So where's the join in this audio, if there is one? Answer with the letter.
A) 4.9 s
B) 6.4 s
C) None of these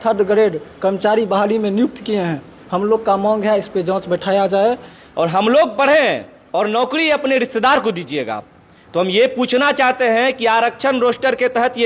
A